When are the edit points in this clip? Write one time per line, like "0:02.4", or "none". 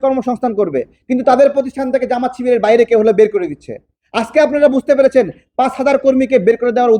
none

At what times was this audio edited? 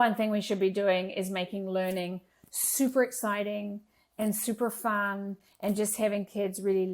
none

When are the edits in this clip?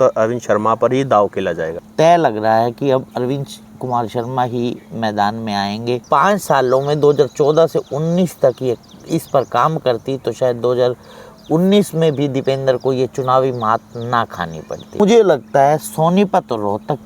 0:01.8
0:06.1
0:15.0

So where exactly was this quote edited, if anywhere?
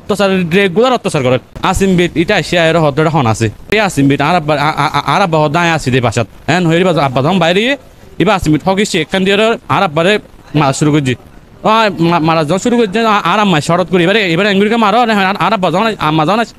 0:01.5

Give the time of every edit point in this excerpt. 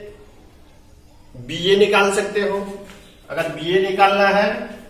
none

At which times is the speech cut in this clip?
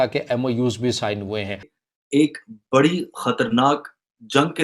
0:01.8

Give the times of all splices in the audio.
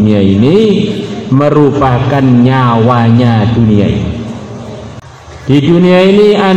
0:05.0

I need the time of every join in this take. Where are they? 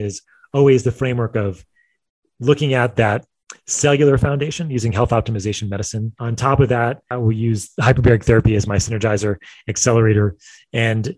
0:06.2
0:07.0

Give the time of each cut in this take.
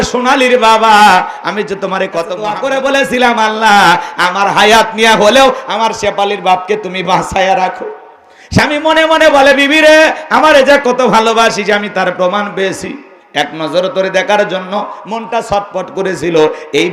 0:02.4

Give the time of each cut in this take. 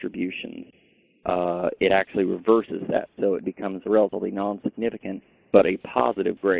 none

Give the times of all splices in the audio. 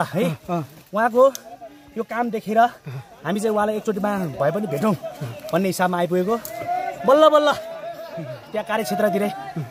none

